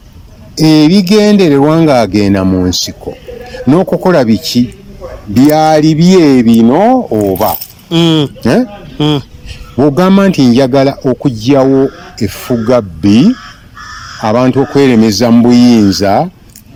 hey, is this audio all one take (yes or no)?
yes